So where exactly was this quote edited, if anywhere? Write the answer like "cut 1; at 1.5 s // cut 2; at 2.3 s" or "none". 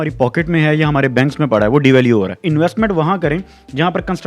cut 1; at 2.4 s